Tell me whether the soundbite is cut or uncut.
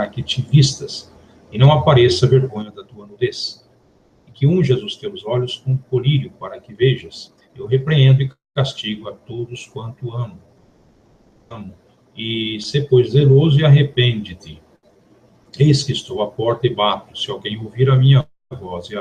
uncut